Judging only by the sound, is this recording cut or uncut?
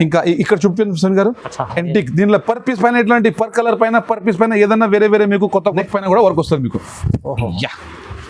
cut